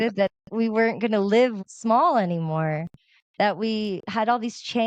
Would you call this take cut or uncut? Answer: cut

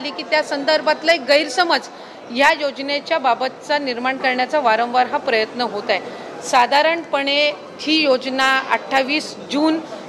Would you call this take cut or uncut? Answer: uncut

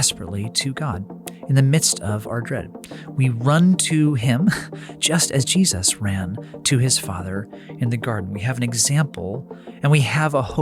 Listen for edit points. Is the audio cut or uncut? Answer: uncut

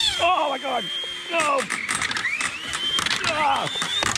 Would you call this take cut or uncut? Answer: uncut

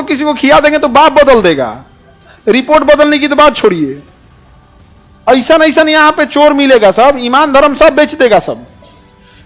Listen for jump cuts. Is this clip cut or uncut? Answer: uncut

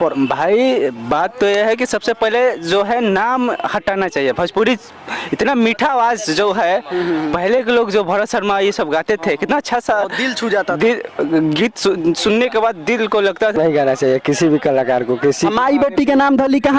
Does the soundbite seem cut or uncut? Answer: cut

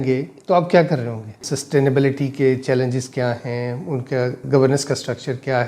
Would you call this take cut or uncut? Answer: cut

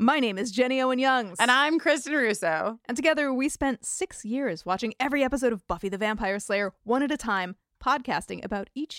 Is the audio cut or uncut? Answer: uncut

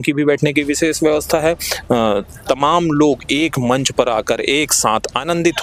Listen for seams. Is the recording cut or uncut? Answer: uncut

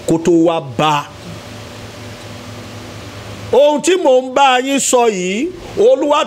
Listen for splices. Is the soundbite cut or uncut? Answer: uncut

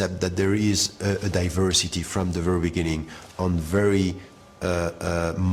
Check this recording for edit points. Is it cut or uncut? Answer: uncut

